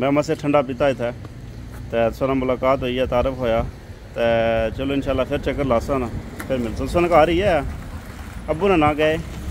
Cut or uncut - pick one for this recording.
uncut